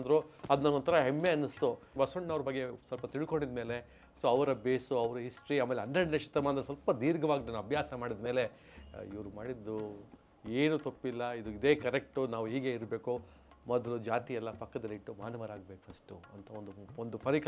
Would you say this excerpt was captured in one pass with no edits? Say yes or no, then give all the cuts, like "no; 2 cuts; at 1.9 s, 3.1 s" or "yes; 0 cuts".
no; 1 cut; at 1.9 s